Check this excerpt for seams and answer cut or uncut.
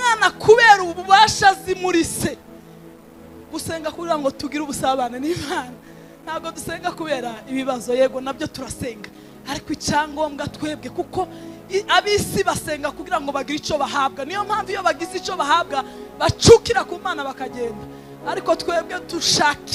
uncut